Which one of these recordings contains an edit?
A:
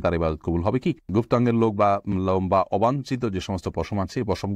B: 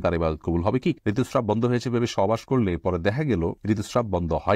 B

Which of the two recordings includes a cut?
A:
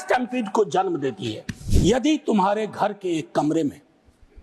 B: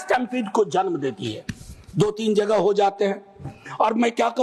A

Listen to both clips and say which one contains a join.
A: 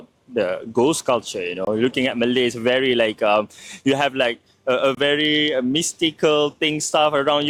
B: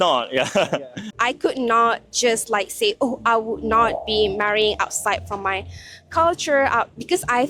B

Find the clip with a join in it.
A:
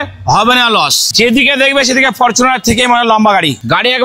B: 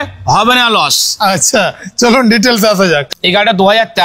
A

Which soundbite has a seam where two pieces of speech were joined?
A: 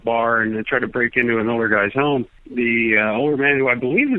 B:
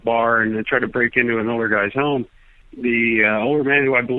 A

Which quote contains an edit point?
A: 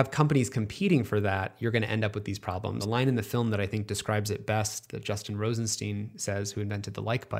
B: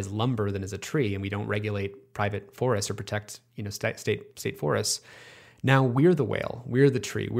A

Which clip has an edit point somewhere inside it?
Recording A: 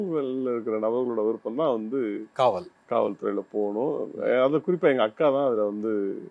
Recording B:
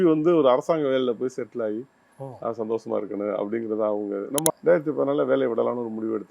B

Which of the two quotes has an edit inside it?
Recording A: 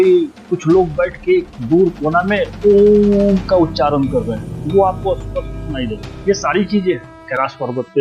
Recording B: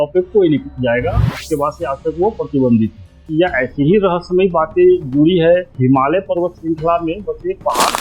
B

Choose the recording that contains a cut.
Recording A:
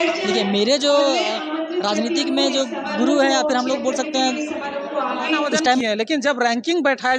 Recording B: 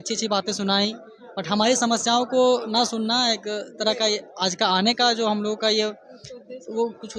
A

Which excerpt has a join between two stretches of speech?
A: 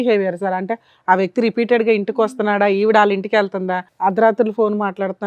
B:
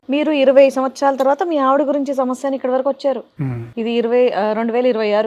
A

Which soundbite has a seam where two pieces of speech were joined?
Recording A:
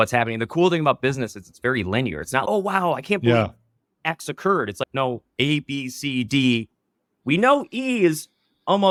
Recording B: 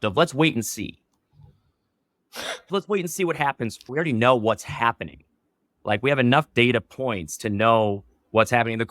B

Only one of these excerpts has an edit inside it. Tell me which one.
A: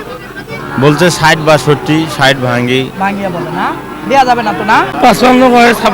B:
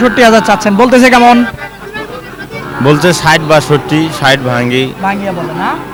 A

